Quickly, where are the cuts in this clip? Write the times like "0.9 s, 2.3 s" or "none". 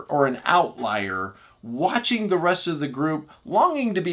none